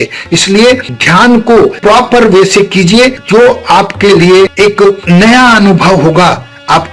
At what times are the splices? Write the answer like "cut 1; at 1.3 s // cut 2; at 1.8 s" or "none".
cut 1; at 3.2 s // cut 2; at 4.5 s